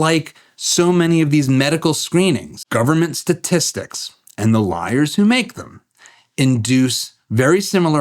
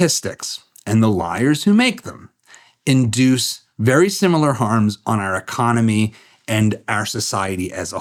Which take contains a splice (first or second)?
first